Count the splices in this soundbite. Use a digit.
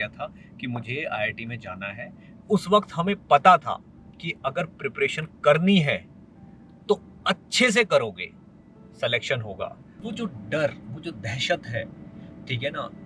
2